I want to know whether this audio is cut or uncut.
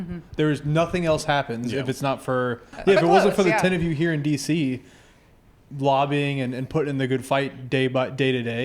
cut